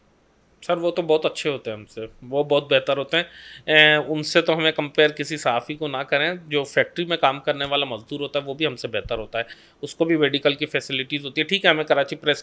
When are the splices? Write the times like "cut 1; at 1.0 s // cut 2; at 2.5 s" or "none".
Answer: none